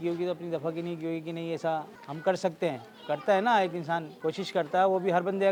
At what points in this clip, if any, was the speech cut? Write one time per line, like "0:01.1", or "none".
none